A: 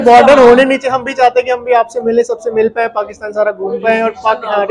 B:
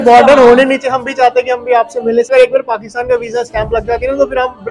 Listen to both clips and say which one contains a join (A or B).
B